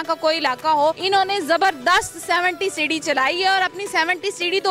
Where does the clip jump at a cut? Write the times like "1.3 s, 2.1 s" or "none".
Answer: 1.0 s